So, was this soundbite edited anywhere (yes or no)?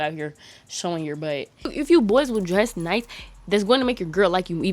yes